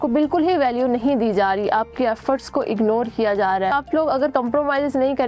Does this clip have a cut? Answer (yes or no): yes